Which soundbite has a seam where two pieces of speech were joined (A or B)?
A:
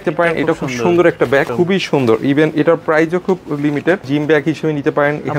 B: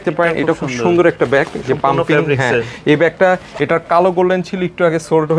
A